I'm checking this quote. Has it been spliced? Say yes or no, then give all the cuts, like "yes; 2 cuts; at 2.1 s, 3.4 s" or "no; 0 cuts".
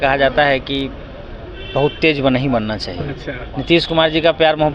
no; 0 cuts